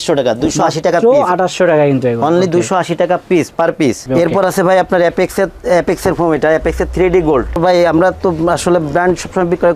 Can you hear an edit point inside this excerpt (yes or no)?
yes